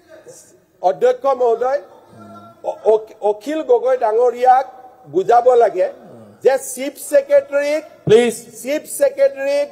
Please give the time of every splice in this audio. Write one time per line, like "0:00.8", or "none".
none